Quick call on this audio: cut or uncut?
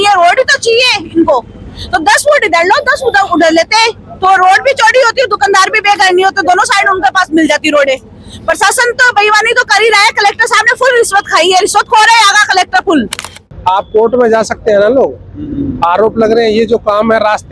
cut